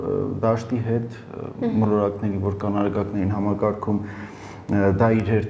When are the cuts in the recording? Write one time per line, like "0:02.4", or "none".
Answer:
none